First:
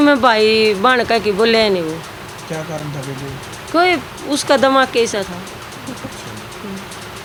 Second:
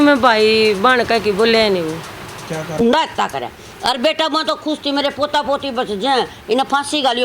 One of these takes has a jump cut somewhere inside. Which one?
second; 1 cut; at 2.8 s

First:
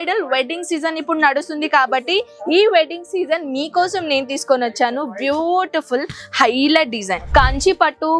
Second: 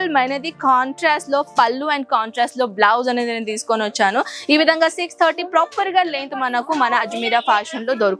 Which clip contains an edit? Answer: first; 1 cut; at 7.2 s

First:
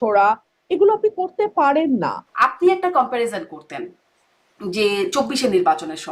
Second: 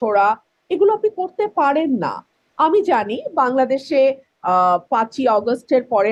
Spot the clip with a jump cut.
first; 1 cut; at 2.2 s

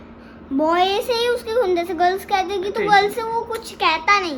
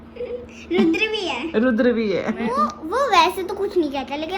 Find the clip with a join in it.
second; 1 cut; at 2.8 s

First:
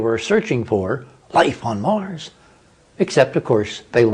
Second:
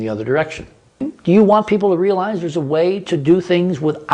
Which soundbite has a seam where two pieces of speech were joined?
second; 1 cut; at 1.1 s

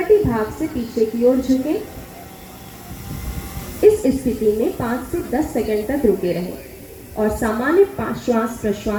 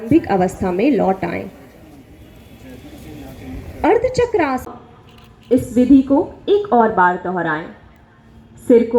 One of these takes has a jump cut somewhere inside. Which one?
second; 1 cut; at 4.8 s

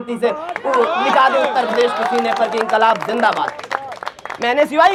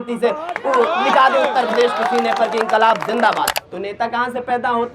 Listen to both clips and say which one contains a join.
second; 1 cut; at 3.6 s

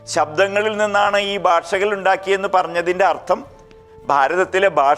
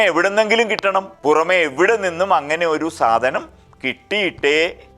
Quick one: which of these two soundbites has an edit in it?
second; 1 cut; at 1.1 s

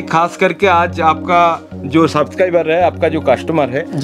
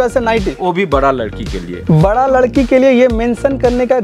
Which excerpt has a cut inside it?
second; 1 cut; at 1.7 s

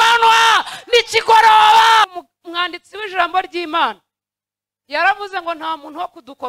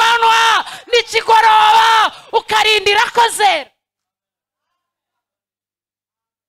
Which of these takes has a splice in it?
first; 1 cut; at 2.2 s

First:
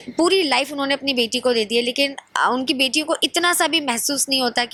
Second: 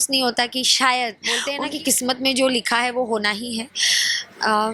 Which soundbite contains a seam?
second; 1 cut; at 1.5 s

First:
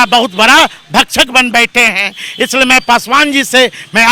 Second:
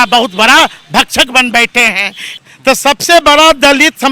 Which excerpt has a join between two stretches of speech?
second; 1 cut; at 2.3 s

